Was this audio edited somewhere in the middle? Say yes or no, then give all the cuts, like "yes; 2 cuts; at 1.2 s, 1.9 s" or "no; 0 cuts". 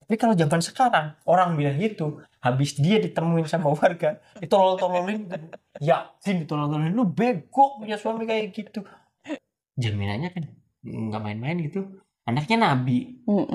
yes; 1 cut; at 9.3 s